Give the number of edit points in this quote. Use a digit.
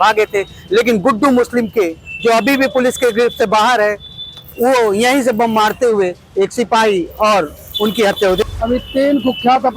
1